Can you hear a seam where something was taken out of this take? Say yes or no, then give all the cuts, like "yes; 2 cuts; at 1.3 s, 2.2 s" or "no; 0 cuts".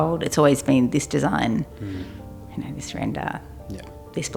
no; 0 cuts